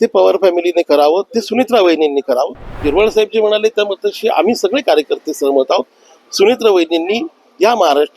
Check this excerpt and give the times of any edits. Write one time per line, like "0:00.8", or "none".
0:02.7

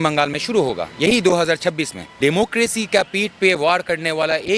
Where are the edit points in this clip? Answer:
0:02.2

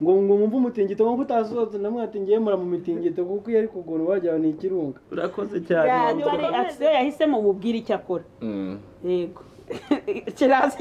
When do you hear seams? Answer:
0:06.4

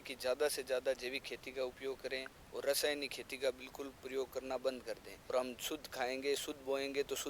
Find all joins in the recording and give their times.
0:05.3

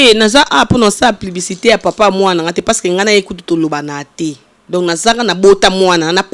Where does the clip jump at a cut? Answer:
none

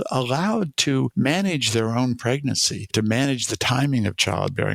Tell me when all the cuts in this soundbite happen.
0:01.1

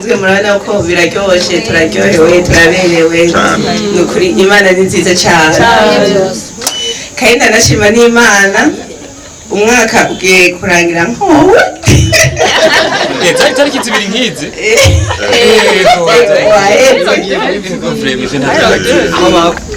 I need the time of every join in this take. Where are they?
none

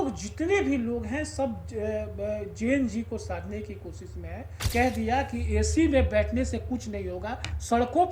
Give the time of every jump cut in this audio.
0:04.7

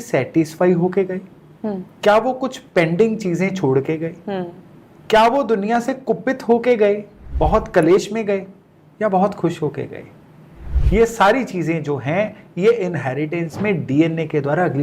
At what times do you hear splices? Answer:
none

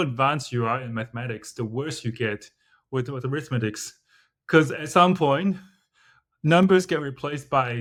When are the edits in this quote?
none

